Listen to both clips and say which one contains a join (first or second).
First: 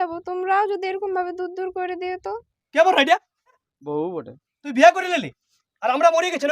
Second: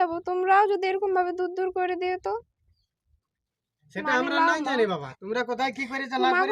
first